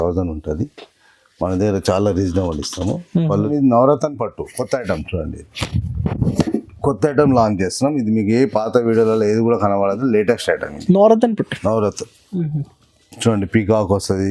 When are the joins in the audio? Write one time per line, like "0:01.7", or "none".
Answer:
0:03.1